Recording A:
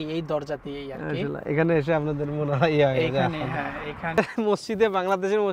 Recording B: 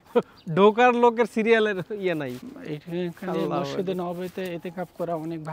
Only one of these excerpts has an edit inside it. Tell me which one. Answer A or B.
A